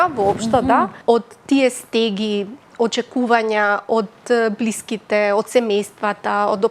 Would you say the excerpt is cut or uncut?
cut